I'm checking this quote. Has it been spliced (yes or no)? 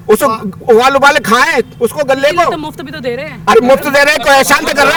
no